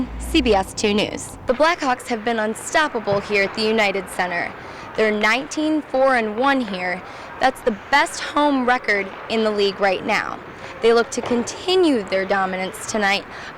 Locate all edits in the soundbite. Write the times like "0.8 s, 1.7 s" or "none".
none